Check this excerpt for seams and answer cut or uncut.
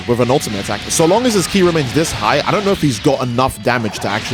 uncut